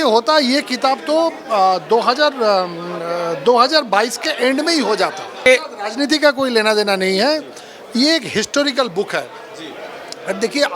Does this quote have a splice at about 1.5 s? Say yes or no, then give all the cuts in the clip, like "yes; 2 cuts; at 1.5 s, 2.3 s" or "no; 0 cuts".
no; 1 cut; at 5.5 s